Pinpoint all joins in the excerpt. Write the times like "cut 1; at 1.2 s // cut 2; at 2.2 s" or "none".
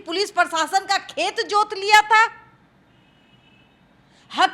none